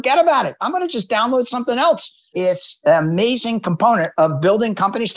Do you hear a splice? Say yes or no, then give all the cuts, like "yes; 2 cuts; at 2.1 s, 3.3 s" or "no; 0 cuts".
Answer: yes; 1 cut; at 2.3 s